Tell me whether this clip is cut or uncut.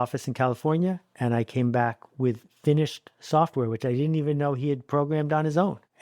uncut